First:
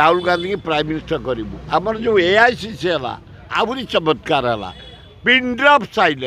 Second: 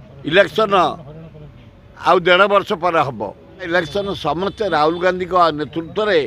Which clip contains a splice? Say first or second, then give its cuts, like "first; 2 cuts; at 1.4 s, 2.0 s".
second; 1 cut; at 3.7 s